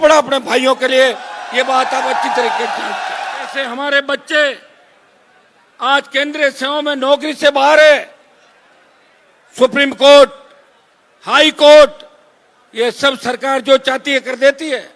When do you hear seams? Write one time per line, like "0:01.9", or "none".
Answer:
0:03.6